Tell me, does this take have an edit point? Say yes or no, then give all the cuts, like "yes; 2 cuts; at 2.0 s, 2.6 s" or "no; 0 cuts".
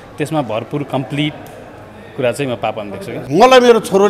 yes; 1 cut; at 3.2 s